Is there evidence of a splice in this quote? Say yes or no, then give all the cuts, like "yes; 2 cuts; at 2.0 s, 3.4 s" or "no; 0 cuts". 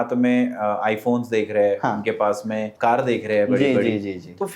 yes; 1 cut; at 2.7 s